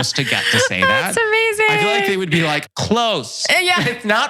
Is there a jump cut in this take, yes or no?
yes